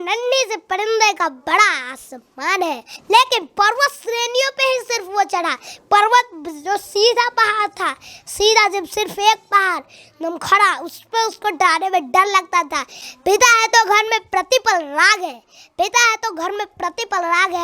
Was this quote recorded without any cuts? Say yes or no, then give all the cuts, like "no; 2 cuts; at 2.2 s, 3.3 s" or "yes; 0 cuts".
no; 2 cuts; at 2.9 s, 13.0 s